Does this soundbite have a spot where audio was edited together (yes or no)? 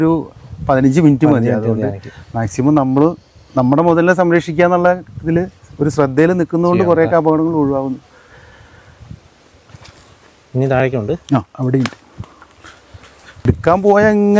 no